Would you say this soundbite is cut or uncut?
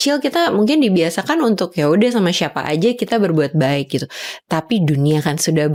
uncut